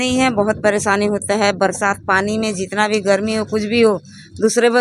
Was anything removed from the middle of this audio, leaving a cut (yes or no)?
no